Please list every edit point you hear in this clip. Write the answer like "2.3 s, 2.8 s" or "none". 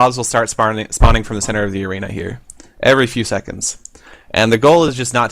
1.4 s